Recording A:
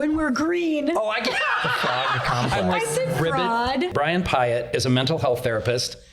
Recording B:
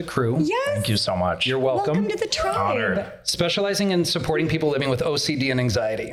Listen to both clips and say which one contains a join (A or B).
A